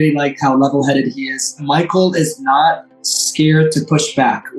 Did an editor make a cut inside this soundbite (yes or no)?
yes